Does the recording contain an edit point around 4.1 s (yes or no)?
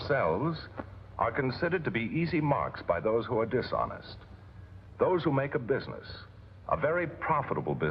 no